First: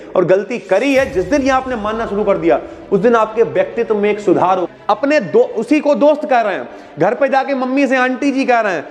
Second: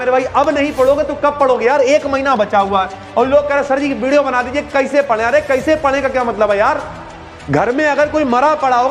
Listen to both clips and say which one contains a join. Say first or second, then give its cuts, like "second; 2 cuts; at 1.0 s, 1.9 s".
first; 1 cut; at 4.7 s